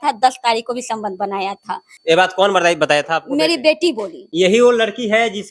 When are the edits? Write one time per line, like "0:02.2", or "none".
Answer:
0:01.9
0:04.2